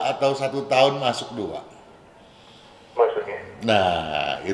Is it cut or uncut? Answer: uncut